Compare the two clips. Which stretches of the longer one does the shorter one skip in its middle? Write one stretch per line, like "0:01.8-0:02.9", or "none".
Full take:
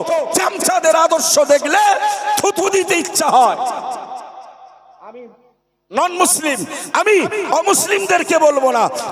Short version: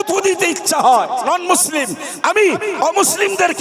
0:03.7-0:05.9